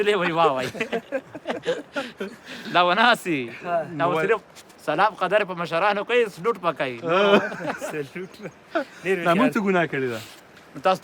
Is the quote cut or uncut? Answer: uncut